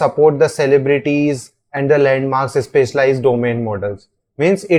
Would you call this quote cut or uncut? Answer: uncut